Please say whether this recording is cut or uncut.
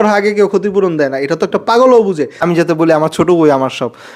cut